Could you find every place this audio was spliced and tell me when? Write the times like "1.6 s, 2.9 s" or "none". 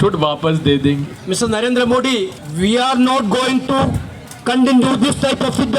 1.1 s, 2.4 s